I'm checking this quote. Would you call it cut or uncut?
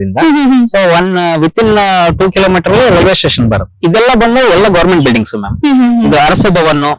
cut